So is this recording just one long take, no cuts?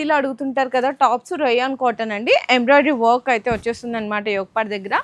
yes; 0 cuts

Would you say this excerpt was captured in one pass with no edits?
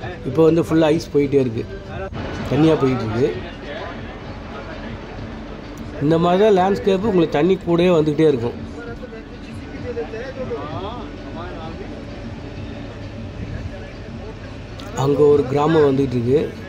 yes; 0 cuts

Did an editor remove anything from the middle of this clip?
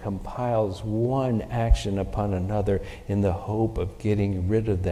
no; 0 cuts

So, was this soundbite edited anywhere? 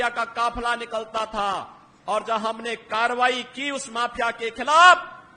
no; 0 cuts

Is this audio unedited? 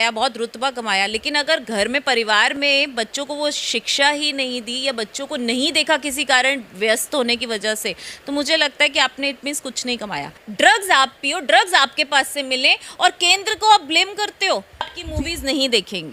no; 2 cuts; at 10.4 s, 15.0 s

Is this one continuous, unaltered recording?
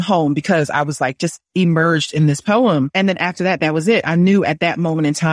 yes; 0 cuts

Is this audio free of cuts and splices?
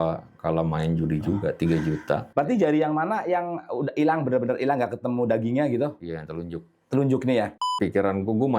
no; 2 cuts; at 2.3 s, 7.7 s

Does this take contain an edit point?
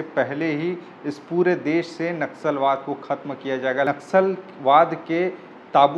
yes; 1 cut; at 3.9 s

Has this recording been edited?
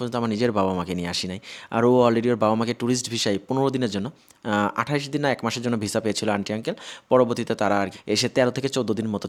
no; 0 cuts

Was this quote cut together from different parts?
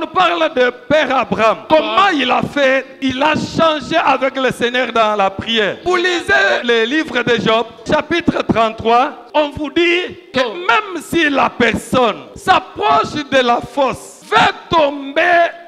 yes; 9 cuts; at 1.6 s, 2.9 s, 5.8 s, 6.6 s, 7.9 s, 9.2 s, 10.2 s, 12.3 s, 14.1 s

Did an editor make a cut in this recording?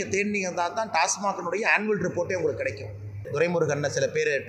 yes; 1 cut; at 3.3 s

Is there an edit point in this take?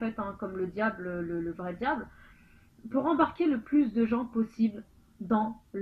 no; 0 cuts

